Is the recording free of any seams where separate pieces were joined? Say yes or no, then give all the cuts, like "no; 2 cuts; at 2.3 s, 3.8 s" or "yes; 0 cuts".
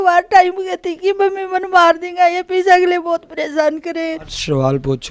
yes; 0 cuts